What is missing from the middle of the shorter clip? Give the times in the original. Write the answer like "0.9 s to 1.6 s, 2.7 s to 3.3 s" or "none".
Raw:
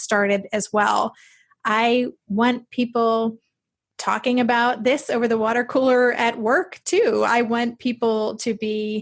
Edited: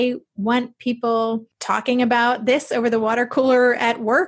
3.4 s to 3.9 s